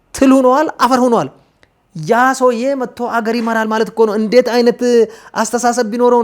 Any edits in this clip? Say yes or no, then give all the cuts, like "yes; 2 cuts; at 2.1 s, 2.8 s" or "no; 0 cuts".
no; 0 cuts